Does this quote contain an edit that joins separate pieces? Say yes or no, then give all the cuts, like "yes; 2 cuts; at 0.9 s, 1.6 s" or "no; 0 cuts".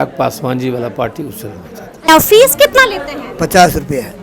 yes; 1 cut; at 2.1 s